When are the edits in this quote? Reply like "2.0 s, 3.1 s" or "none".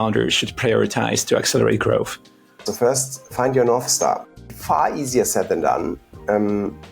2.7 s, 4.3 s